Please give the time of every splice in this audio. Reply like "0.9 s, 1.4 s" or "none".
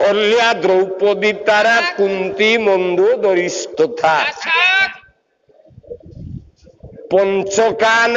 none